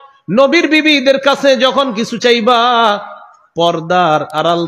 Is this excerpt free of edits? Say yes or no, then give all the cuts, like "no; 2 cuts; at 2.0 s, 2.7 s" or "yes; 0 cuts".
yes; 0 cuts